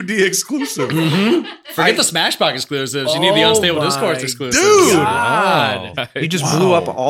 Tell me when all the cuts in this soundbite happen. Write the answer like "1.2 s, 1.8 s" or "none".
5.9 s